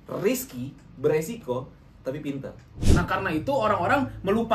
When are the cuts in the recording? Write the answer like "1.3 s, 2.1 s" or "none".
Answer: 2.6 s